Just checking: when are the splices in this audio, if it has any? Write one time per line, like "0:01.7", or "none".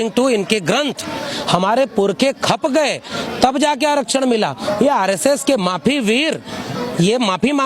0:01.3